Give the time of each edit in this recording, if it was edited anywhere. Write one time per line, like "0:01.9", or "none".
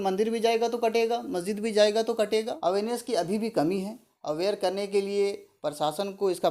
0:02.5